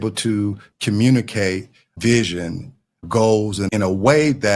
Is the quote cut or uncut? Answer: cut